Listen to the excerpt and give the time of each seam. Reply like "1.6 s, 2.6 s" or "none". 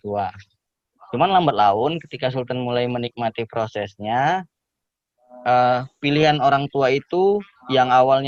none

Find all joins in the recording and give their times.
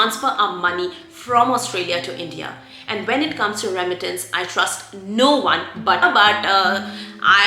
6.0 s

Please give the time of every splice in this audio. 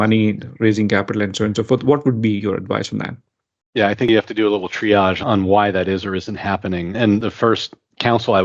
7.2 s

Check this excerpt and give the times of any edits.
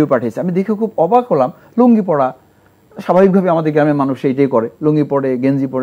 none

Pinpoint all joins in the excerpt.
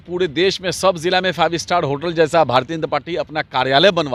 none

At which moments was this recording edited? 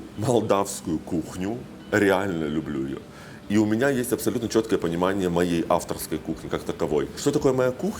none

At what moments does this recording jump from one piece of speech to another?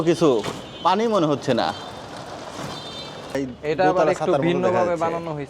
3.4 s

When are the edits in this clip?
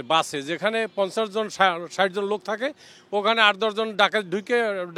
none

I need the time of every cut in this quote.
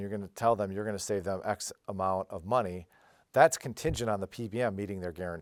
none

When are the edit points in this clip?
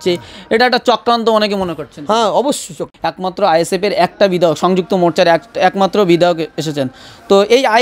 2.8 s

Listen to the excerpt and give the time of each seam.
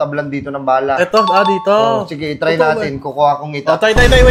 none

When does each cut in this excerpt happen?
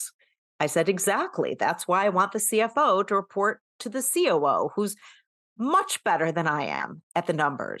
none

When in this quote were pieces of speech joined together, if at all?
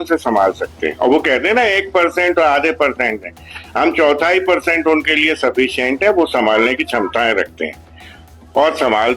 none

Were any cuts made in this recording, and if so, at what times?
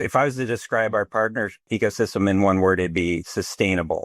1.7 s

